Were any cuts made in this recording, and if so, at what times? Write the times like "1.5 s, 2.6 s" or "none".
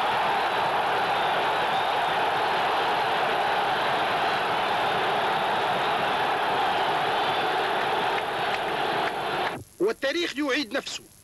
none